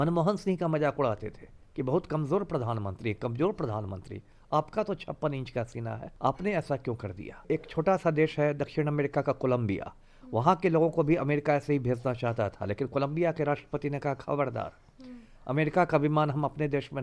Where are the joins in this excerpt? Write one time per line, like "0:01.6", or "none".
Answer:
0:06.1
0:07.4